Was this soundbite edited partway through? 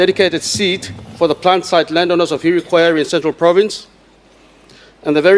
no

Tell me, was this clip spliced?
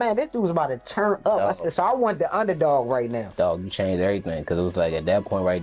no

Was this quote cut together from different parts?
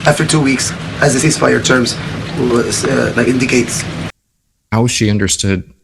no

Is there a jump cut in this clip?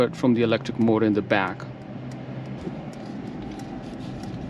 yes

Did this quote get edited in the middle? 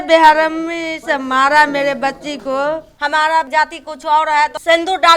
yes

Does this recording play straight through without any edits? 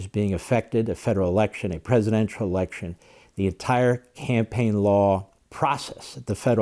no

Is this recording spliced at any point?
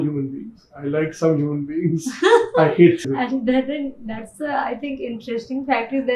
yes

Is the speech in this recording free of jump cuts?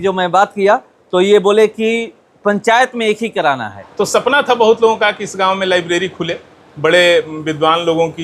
no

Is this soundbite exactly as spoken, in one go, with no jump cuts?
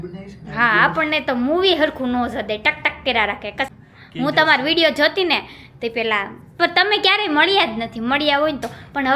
no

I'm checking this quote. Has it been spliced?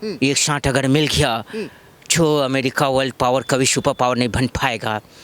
no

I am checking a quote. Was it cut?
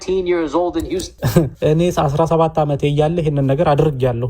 yes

